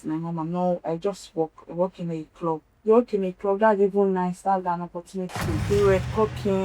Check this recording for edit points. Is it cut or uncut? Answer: cut